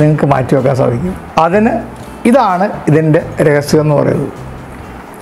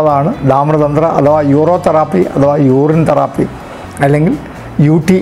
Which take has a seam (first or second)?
first